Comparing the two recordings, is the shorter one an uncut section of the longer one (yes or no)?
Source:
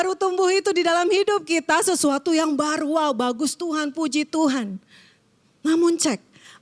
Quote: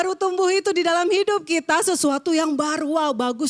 yes